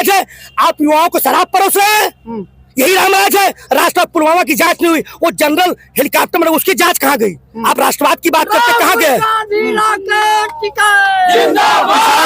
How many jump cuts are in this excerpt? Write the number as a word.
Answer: zero